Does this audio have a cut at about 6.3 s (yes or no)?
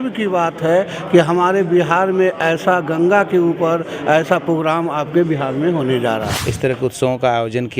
yes